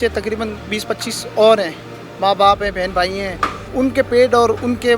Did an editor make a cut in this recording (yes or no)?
yes